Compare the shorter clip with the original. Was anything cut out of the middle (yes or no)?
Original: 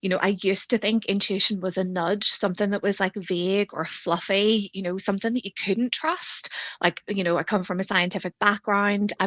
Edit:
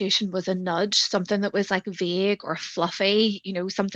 no